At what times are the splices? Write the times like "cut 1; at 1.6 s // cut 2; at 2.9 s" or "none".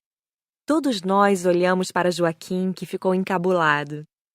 cut 1; at 2.2 s

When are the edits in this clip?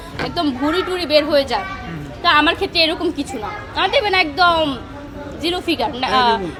none

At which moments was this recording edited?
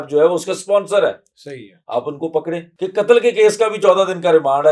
cut 1; at 2.7 s

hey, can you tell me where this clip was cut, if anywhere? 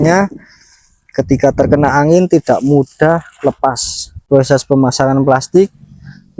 cut 1; at 4.3 s

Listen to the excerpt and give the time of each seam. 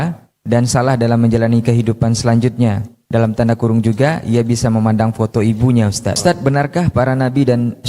cut 1; at 6.2 s

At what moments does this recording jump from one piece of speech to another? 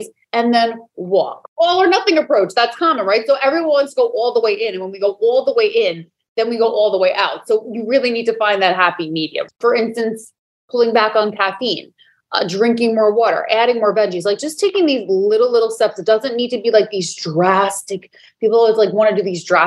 cut 1; at 1.4 s

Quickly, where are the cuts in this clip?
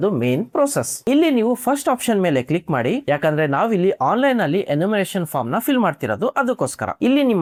none

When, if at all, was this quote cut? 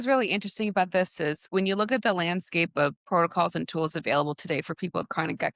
none

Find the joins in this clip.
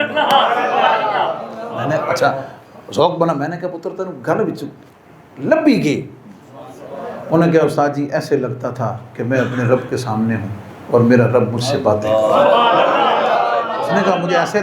none

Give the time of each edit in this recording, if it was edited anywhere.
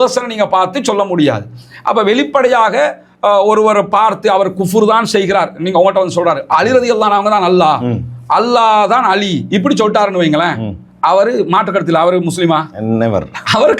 none

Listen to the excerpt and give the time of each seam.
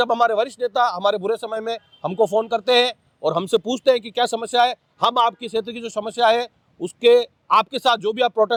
none

